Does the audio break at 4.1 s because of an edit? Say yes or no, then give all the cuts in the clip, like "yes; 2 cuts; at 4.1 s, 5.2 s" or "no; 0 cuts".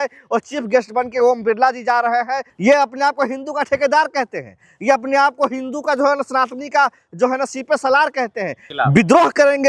no; 2 cuts; at 2.5 s, 8.6 s